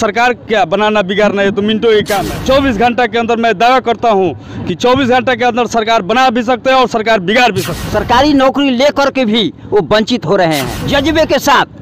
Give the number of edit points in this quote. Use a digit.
3